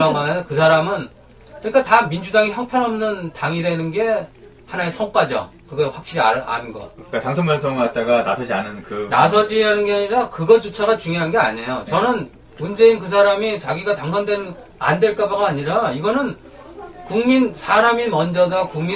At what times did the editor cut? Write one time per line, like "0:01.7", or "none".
0:03.4